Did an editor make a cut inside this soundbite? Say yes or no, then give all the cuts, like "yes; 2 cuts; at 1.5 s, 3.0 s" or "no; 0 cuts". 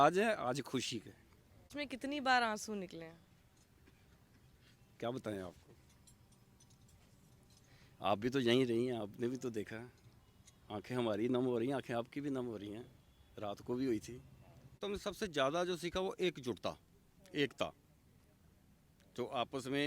yes; 2 cuts; at 1.7 s, 14.8 s